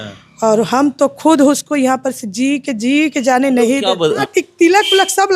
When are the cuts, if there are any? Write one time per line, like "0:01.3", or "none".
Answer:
0:04.2

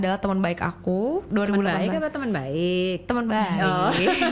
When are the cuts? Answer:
0:01.3

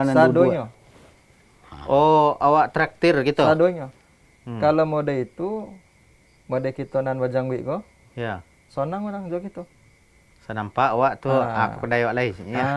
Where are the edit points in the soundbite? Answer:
none

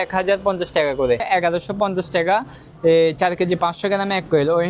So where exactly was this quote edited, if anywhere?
0:01.2

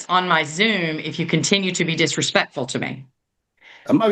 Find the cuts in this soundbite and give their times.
none

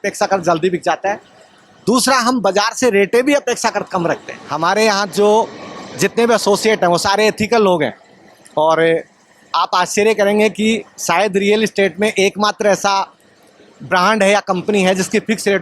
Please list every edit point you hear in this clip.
0:04.3

